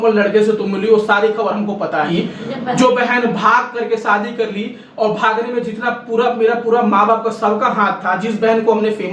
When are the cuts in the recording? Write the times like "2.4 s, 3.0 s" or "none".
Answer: 2.1 s